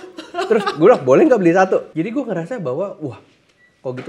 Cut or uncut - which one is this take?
cut